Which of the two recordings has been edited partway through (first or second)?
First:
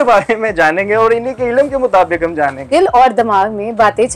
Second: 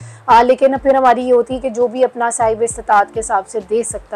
first